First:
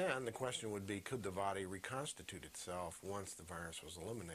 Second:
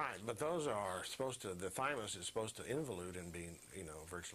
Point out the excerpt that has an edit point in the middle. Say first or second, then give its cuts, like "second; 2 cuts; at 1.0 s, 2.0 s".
first; 1 cut; at 2.0 s